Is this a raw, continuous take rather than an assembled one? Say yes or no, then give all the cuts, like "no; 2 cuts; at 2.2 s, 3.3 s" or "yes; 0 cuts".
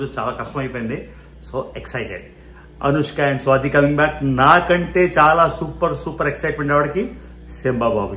yes; 0 cuts